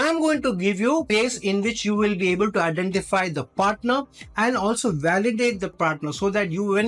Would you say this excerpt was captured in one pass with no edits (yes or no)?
no